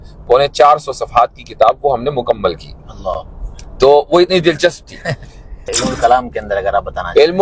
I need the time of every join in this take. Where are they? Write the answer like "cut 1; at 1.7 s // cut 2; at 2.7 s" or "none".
cut 1; at 5.7 s